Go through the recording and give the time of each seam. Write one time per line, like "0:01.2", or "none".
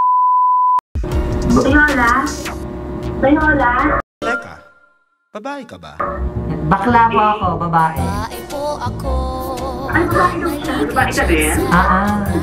0:00.9

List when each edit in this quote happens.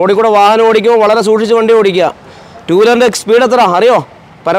none

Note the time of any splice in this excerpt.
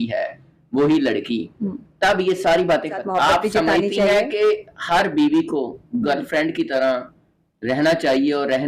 0:03.0

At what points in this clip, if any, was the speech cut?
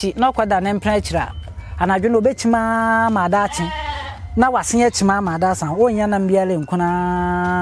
none

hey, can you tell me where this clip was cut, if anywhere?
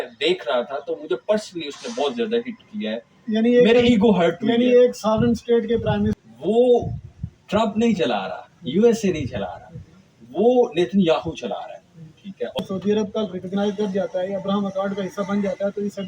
0:06.2
0:12.6

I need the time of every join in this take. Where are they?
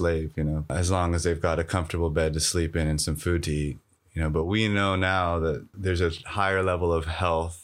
0:00.7
0:05.7

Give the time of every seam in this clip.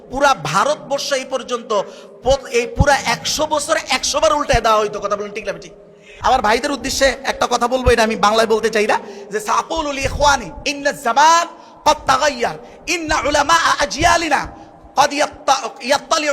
0:06.1

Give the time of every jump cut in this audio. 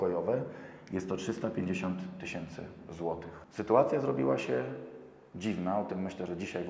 0:03.4

